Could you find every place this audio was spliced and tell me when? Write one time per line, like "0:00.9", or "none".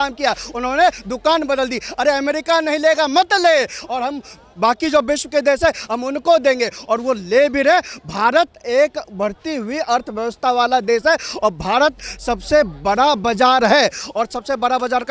none